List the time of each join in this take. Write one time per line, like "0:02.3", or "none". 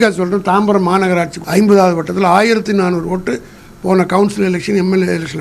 0:01.4